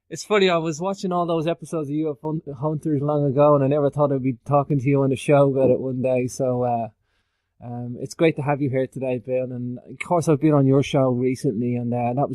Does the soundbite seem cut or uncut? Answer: cut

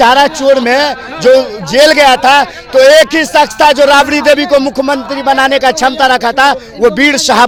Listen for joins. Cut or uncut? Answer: uncut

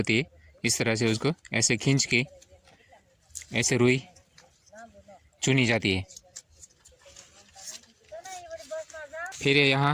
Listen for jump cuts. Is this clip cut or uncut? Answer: uncut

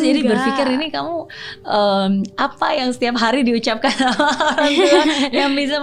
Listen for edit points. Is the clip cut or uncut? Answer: uncut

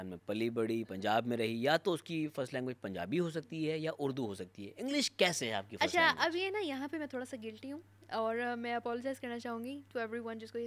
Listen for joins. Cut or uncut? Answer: uncut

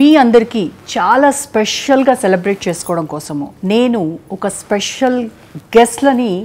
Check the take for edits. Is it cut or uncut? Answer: uncut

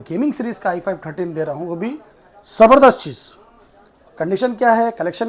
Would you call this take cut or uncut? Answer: uncut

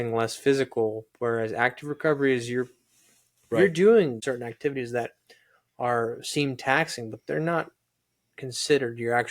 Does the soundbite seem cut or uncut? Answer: cut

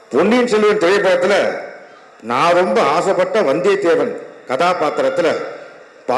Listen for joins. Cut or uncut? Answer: uncut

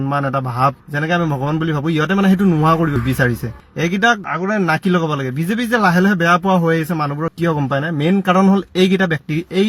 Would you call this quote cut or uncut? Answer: uncut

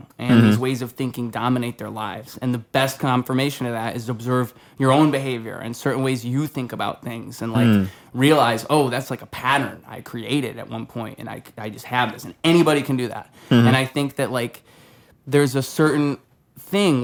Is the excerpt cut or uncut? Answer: uncut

